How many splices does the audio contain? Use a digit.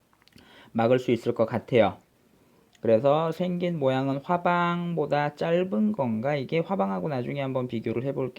1